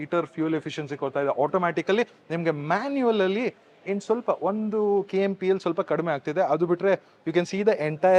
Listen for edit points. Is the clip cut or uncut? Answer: uncut